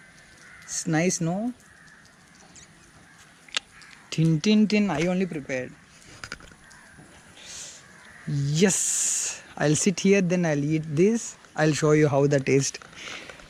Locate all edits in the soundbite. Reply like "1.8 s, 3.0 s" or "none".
none